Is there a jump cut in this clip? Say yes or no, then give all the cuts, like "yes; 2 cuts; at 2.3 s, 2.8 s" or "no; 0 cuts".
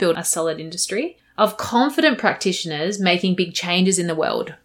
yes; 1 cut; at 1.2 s